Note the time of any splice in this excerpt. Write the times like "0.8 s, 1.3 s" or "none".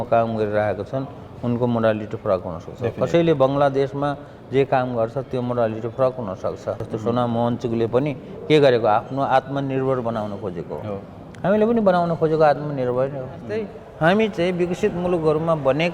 6.9 s, 13.8 s